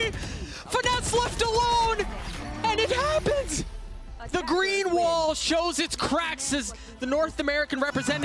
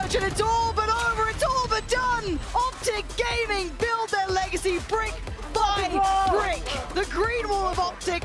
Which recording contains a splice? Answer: second; 1 cut; at 2.4 s

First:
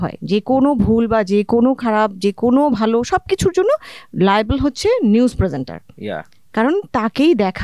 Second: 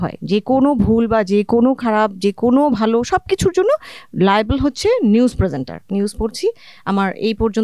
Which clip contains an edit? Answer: second; 1 cut; at 5.8 s

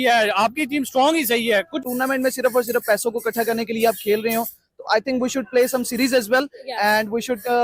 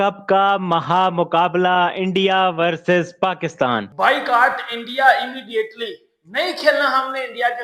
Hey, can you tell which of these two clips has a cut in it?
second; 1 cut; at 3.9 s

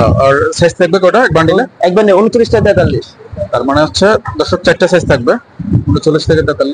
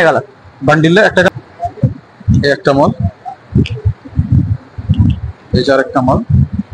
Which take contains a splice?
second; 1 cut; at 1.3 s

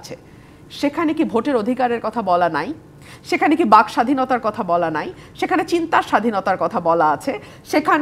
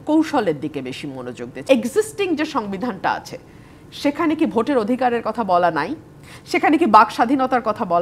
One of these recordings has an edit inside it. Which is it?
second; 1 cut; at 1.6 s

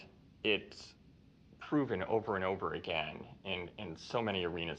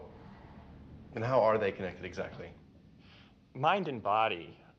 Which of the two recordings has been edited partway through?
first; 1 cut; at 1.9 s

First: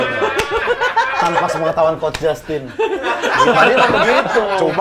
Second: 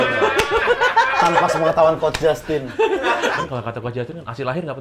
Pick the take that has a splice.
second; 1 cut; at 3.3 s

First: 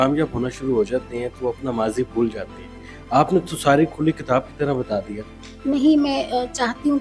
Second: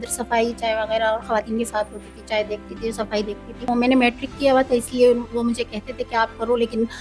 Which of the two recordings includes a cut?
second; 1 cut; at 3.7 s

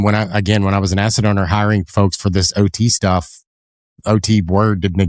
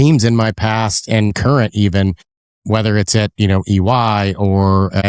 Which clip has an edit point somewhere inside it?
second; 1 cut; at 1.3 s

